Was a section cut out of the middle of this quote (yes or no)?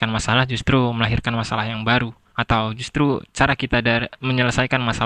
no